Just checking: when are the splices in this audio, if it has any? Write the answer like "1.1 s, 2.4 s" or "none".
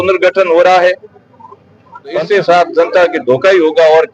2.2 s